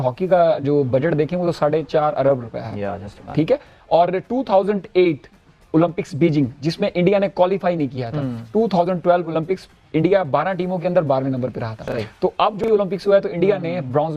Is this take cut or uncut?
uncut